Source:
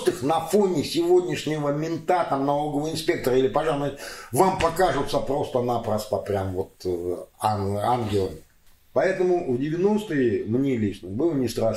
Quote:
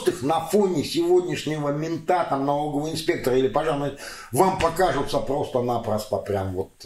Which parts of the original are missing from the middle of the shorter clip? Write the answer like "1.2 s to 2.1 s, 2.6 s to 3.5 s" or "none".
none